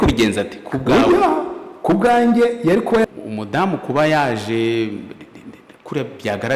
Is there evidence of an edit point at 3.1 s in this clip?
yes; 1 cut; at 3.1 s

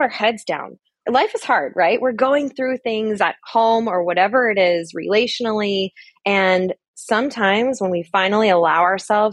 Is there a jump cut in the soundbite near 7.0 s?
no; 1 cut; at 1.0 s

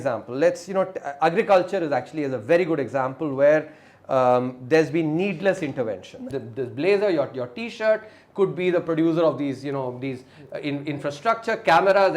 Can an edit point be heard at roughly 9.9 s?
no; 1 cut; at 6.3 s

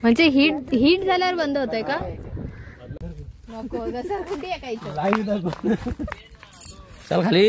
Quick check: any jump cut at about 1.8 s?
no; 1 cut; at 3.0 s

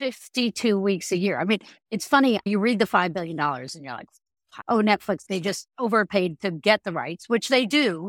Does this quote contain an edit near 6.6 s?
no; 3 cuts; at 2.5 s, 4.5 s, 5.2 s

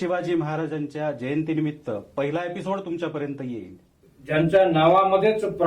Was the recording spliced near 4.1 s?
yes; 1 cut; at 4.1 s

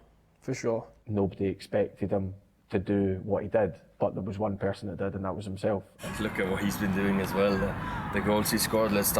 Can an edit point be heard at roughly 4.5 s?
no; 2 cuts; at 1.0 s, 6.0 s

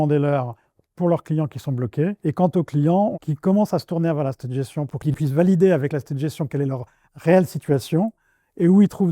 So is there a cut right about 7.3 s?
no; 3 cuts; at 2.2 s, 3.2 s, 5.1 s

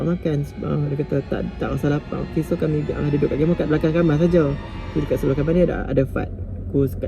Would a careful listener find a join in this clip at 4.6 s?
no; 1 cut; at 0.9 s

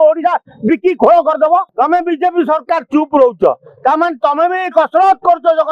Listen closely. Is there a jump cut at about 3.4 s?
no; 1 cut; at 1.7 s

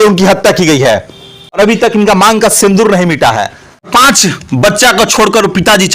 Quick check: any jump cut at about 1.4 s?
yes; 2 cuts; at 1.4 s, 3.9 s

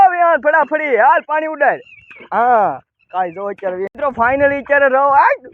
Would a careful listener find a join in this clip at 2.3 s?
no; 1 cut; at 3.9 s

